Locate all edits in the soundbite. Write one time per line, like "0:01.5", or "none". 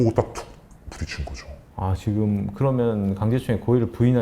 none

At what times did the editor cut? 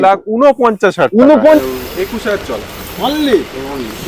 0:01.6

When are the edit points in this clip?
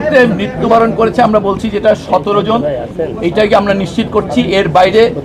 none

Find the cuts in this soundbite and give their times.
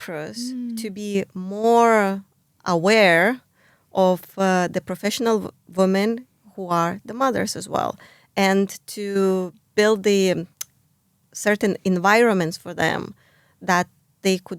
none

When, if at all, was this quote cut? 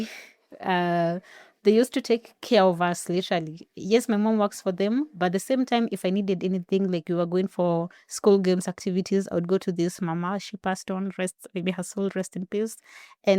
none

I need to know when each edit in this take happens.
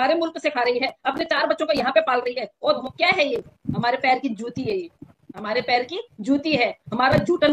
0:02.8

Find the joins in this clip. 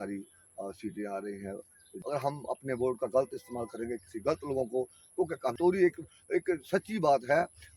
0:01.9
0:05.5

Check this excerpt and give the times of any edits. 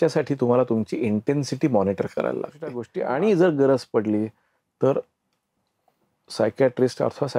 0:02.9

